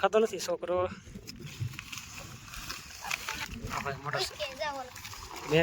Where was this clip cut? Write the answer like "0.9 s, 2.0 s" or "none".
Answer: 3.4 s